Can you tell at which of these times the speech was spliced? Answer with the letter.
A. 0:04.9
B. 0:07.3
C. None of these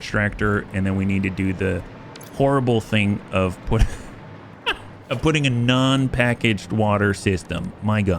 A